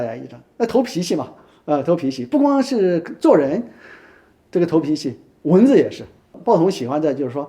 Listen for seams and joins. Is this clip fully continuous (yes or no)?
no